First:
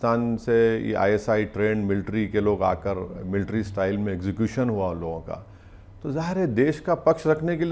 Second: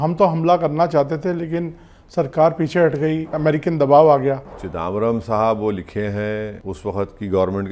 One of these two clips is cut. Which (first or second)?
second